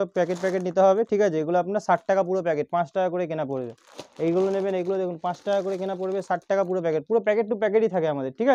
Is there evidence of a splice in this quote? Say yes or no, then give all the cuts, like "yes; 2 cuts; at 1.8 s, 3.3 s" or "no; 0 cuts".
no; 0 cuts